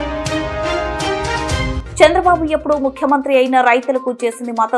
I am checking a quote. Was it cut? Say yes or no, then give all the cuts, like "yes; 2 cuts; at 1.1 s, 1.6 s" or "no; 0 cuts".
no; 0 cuts